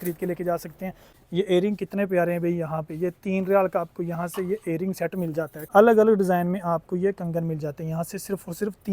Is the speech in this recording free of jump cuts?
no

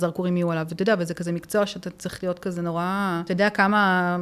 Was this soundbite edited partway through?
yes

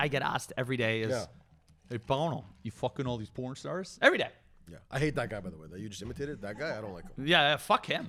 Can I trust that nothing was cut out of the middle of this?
yes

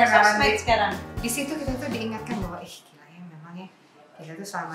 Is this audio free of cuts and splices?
no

